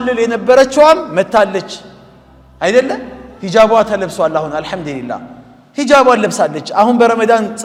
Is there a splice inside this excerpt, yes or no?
no